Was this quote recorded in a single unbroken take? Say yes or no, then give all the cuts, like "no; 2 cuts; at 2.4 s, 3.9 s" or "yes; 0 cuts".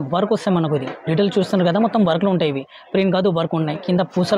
yes; 0 cuts